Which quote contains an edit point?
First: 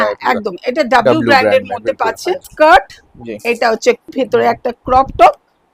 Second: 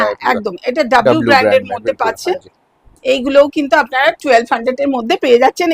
first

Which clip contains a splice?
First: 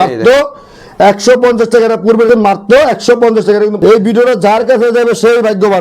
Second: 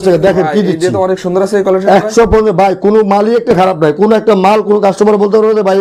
first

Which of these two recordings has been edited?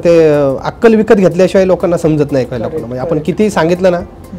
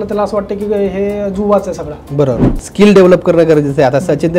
second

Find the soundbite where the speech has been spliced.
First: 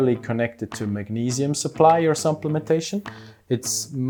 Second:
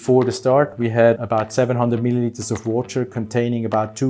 second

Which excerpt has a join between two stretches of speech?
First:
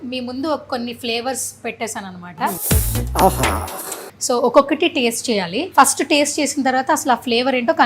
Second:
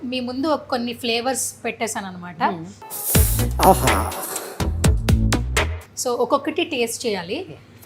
first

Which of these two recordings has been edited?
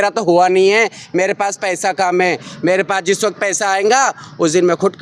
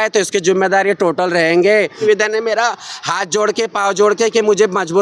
second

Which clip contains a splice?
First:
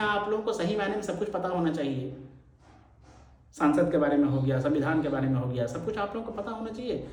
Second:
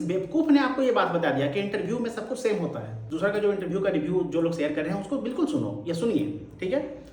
second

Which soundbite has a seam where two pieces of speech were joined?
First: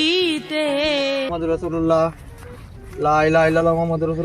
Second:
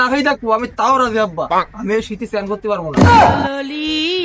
first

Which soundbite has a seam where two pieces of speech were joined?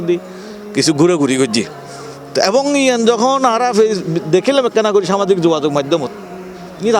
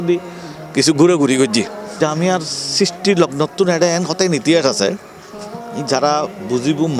second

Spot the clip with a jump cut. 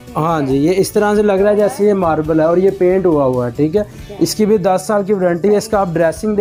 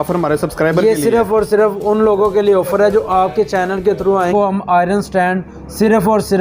second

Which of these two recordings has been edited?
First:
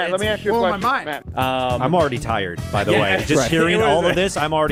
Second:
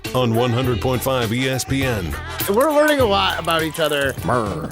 second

